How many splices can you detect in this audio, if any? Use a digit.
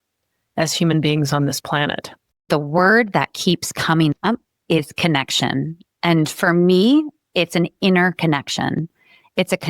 1